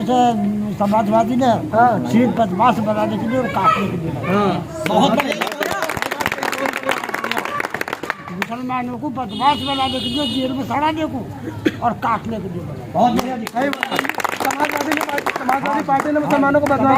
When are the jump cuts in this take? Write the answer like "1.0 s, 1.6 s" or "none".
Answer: none